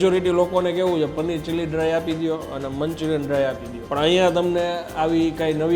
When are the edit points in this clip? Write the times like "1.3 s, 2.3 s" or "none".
3.7 s